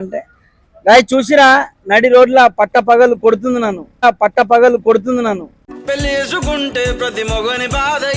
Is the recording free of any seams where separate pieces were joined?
yes; 0 cuts

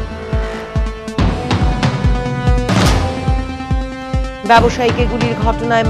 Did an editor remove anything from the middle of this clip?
no; 0 cuts

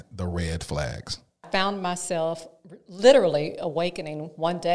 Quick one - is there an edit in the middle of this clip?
yes; 1 cut; at 1.4 s

